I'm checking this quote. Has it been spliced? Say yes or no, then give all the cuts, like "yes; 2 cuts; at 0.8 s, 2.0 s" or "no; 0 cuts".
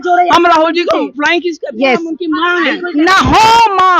yes; 1 cut; at 2.8 s